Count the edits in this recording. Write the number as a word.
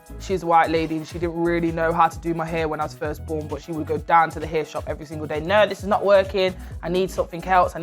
one